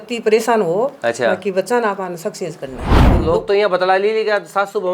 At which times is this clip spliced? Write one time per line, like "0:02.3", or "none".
0:03.1